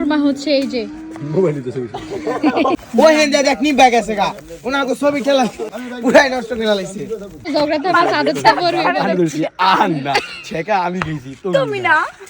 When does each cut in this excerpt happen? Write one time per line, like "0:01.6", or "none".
0:02.9
0:05.8
0:07.2